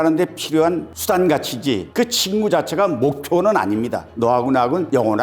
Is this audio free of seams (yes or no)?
no